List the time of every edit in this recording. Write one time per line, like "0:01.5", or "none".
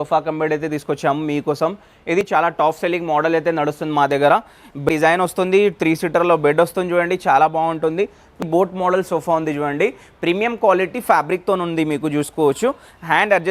0:02.3
0:04.9
0:08.4